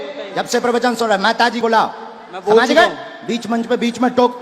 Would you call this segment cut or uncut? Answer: cut